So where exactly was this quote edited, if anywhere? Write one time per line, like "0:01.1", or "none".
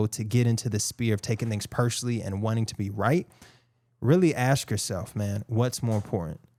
none